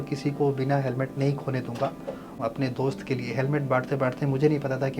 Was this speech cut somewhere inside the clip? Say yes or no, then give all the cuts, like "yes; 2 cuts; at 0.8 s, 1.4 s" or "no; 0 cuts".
yes; 1 cut; at 2.3 s